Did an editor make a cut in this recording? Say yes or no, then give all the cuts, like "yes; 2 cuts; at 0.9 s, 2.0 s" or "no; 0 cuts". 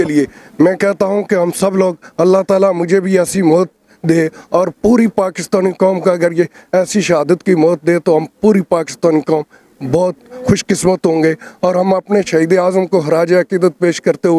no; 0 cuts